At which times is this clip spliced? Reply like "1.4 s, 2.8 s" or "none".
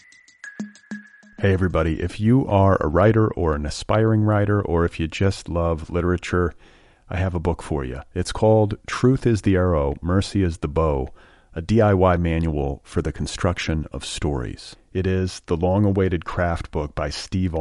0.9 s